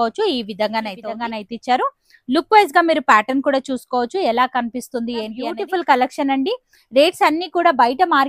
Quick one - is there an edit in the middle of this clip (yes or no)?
yes